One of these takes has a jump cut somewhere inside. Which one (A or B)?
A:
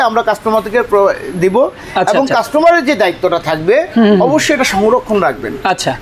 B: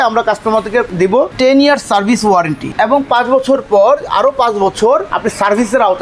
B